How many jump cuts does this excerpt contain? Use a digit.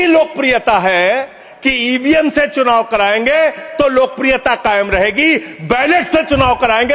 1